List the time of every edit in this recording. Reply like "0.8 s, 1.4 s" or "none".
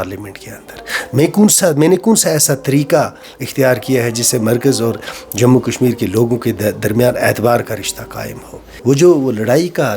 8.7 s